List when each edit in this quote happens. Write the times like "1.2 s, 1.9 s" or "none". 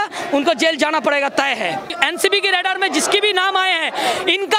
1.9 s